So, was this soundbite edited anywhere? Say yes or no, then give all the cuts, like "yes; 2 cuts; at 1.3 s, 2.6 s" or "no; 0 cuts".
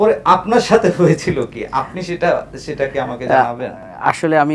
no; 0 cuts